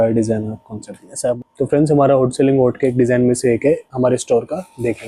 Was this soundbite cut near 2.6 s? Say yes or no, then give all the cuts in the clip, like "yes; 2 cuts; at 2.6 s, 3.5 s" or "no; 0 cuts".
no; 1 cut; at 1.4 s